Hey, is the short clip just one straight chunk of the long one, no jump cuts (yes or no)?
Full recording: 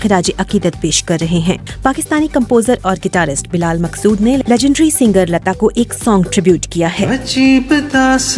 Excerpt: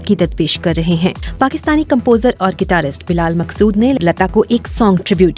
no